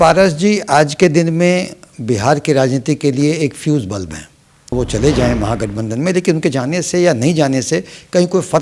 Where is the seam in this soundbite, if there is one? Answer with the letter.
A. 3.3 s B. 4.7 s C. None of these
B